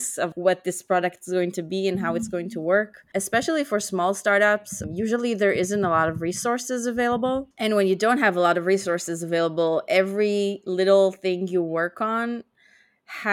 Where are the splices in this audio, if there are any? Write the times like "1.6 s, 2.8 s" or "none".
3.0 s, 4.7 s